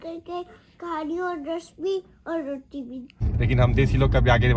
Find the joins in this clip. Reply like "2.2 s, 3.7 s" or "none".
3.1 s